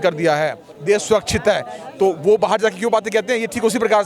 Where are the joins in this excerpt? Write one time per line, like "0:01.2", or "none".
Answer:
none